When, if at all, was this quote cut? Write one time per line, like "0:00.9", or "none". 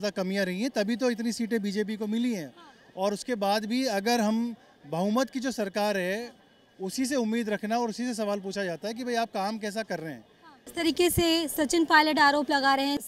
none